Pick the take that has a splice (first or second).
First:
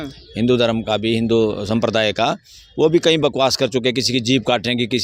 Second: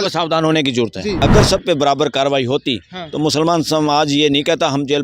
second